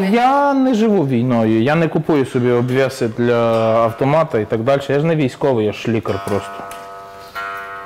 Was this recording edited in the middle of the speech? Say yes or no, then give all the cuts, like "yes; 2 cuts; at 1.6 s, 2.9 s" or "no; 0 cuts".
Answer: no; 0 cuts